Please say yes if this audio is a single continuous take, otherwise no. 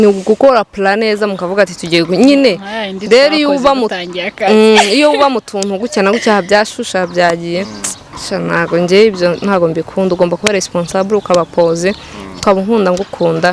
yes